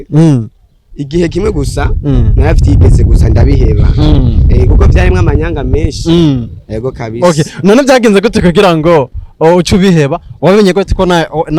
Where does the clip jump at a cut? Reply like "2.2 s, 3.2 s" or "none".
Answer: none